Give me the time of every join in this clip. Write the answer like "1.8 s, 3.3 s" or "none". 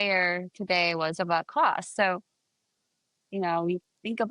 none